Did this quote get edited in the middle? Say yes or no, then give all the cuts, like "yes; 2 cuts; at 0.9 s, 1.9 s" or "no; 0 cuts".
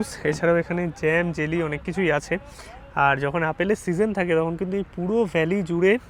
no; 0 cuts